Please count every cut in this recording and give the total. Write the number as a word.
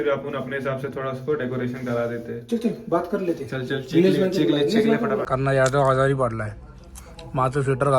one